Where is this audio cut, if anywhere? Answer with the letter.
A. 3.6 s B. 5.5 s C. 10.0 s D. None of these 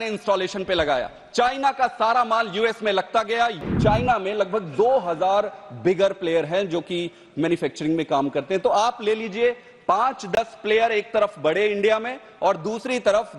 A